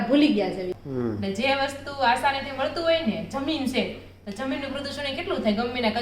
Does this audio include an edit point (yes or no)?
yes